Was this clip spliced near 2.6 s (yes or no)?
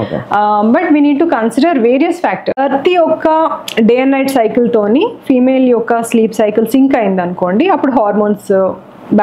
yes